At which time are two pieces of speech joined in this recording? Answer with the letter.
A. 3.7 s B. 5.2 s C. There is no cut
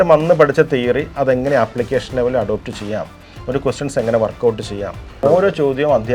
B